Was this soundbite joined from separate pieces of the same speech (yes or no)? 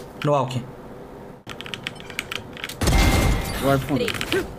yes